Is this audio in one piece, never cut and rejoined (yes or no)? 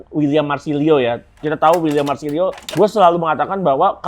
no